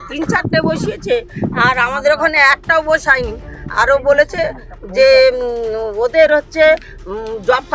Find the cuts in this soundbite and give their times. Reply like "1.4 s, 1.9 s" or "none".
none